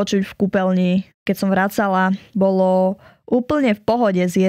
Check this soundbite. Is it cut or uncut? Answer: cut